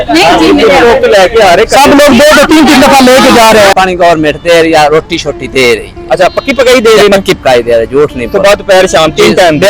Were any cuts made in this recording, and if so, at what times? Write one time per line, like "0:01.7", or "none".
0:03.7